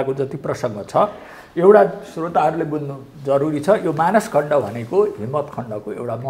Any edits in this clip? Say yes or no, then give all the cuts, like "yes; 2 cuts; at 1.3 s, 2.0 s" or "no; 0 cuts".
no; 0 cuts